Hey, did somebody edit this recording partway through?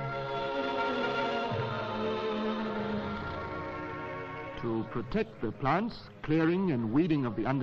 no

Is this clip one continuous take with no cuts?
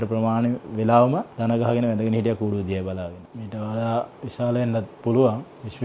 no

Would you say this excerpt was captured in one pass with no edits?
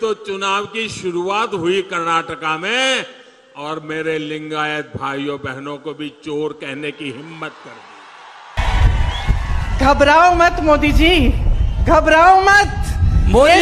no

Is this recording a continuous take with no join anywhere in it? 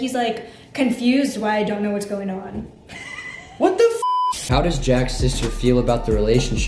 no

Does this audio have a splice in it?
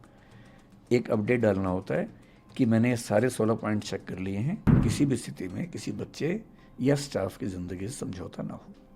yes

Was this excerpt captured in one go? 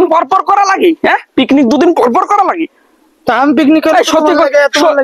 yes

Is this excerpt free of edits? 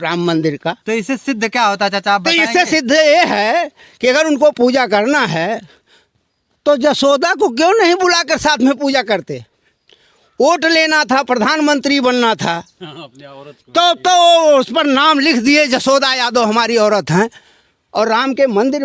yes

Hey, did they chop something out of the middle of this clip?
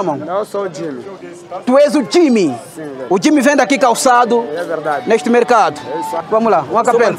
yes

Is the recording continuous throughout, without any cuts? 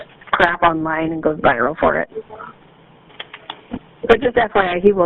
yes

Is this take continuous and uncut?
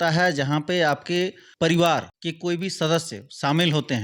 no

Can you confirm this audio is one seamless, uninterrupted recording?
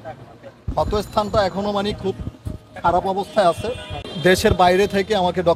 no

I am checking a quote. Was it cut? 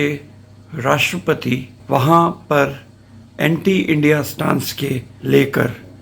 yes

